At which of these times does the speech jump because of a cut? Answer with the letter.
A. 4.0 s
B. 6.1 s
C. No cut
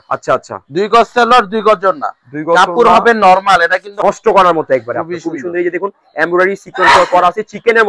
A